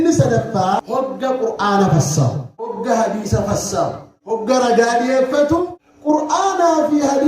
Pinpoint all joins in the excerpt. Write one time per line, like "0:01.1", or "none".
0:00.8
0:02.8
0:04.1
0:05.4

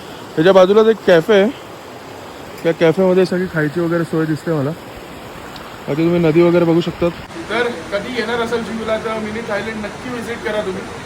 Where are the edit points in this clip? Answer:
0:07.3

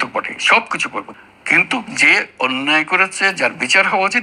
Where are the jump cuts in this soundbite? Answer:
0:01.1

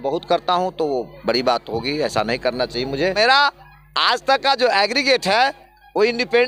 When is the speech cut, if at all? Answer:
0:03.1

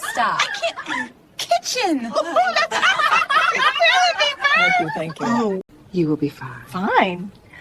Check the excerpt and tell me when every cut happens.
0:05.7

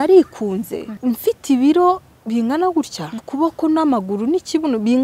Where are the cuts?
0:00.9
0:03.2

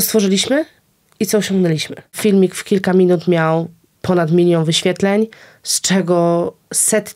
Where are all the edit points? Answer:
0:02.2

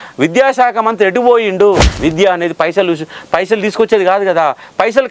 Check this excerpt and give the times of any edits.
0:01.9

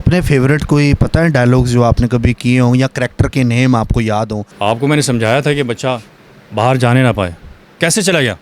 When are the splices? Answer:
0:04.5

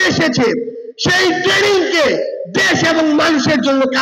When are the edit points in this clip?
none

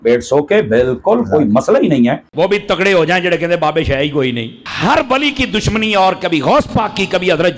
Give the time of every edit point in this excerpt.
0:02.3

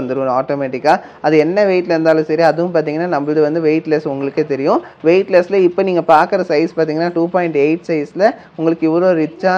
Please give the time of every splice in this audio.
none

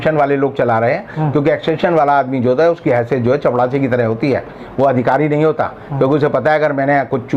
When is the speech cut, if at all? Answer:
none

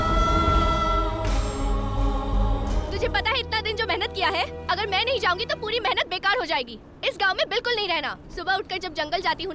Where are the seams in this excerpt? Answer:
0:02.8
0:08.2

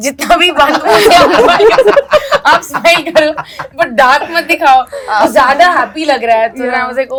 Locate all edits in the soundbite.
none

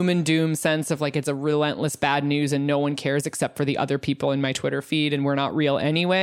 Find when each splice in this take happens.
none

